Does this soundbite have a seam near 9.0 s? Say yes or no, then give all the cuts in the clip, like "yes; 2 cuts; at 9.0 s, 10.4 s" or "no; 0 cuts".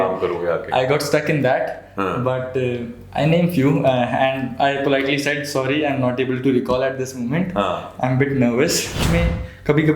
yes; 1 cut; at 9.0 s